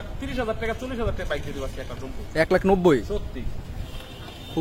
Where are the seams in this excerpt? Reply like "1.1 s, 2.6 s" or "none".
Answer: none